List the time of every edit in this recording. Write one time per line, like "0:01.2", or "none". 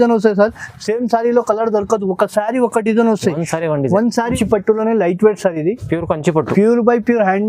0:04.3